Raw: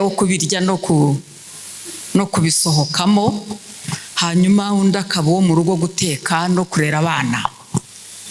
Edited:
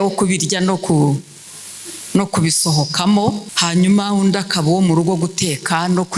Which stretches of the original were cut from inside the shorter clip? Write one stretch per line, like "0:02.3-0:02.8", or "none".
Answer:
0:03.5-0:04.1